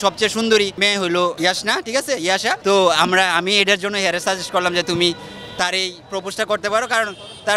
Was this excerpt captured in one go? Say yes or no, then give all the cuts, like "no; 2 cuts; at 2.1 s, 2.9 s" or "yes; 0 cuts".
no; 2 cuts; at 1.1 s, 2.6 s